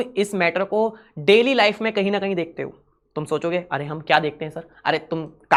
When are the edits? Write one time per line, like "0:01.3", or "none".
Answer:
none